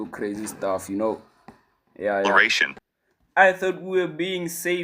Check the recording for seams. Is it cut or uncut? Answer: cut